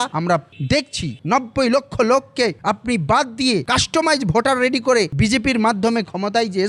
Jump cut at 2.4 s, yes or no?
no